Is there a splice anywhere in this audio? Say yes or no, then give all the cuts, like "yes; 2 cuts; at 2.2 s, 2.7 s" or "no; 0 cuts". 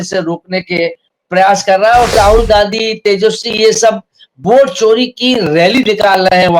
yes; 1 cut; at 2.1 s